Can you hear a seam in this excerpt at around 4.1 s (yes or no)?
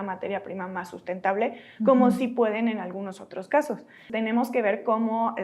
yes